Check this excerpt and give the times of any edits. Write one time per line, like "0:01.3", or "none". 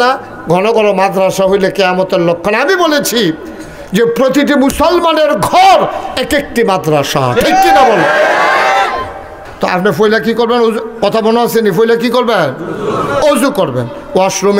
0:09.4